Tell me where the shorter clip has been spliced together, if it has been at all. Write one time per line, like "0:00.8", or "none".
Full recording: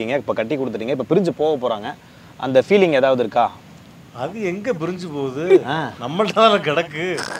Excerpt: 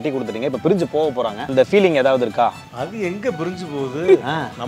0:01.4
0:02.7